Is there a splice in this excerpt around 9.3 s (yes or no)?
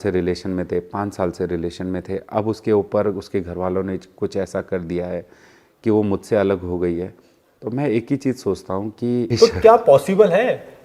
yes